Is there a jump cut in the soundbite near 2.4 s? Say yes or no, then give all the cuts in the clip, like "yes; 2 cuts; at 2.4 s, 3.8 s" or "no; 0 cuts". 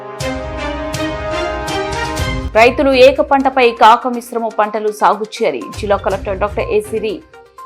yes; 1 cut; at 2.4 s